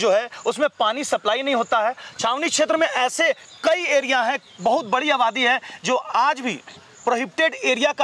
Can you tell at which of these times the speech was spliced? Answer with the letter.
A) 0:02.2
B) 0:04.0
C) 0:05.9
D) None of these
D